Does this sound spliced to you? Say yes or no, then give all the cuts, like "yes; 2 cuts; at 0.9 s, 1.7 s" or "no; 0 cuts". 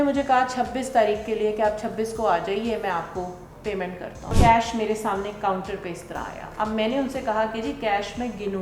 yes; 1 cut; at 4.3 s